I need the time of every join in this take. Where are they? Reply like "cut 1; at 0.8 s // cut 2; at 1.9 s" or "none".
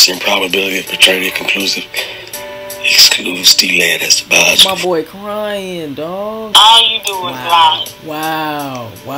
cut 1; at 6.5 s